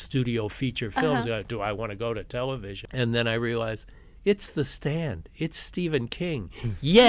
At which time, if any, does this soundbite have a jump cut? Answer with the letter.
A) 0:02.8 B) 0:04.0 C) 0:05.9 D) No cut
A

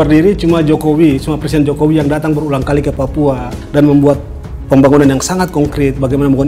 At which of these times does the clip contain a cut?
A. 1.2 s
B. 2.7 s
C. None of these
C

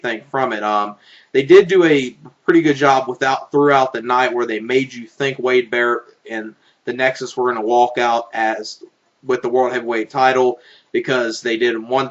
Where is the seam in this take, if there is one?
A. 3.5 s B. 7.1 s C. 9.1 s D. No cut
B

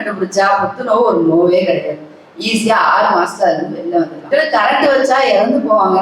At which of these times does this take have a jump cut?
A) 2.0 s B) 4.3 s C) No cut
B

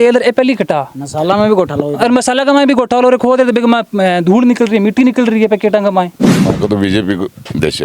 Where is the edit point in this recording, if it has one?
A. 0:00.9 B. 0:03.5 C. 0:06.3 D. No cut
C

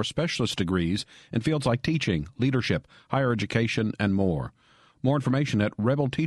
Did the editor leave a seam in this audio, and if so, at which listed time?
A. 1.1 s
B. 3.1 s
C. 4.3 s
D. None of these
D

